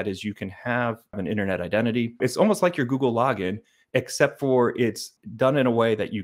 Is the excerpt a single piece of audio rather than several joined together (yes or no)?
no